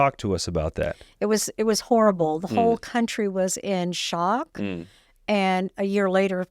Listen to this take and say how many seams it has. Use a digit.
0